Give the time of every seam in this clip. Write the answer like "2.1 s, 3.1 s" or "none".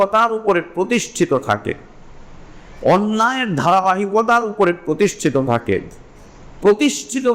none